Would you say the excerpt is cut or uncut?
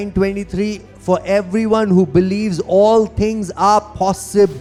uncut